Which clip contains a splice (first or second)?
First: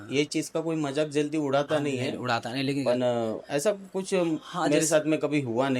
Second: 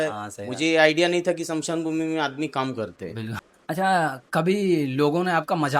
second